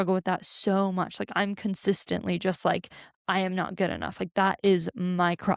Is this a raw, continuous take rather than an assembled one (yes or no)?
yes